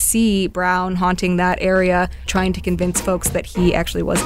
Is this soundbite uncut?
yes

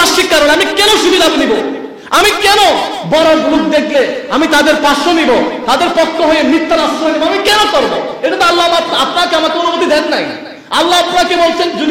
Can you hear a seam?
no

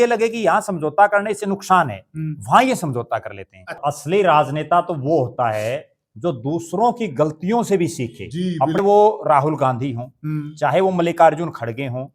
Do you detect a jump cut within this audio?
yes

